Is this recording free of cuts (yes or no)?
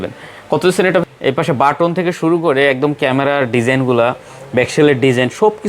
no